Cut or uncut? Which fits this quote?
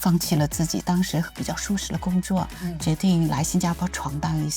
uncut